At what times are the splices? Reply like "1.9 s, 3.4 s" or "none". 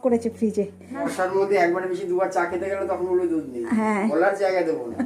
1.0 s, 4.1 s